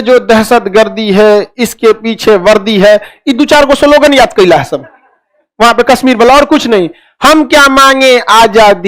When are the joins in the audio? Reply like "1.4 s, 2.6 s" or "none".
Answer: none